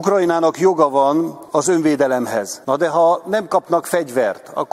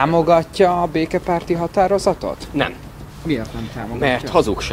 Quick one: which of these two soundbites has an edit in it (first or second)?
first